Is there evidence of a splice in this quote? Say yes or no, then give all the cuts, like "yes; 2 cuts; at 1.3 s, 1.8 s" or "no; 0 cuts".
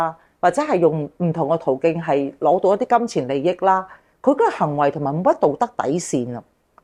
no; 0 cuts